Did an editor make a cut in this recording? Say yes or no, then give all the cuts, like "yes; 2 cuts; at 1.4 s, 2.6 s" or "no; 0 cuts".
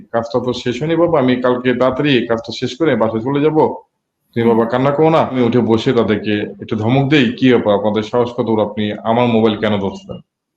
yes; 1 cut; at 5.3 s